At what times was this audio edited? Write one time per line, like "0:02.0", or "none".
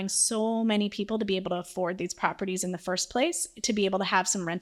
none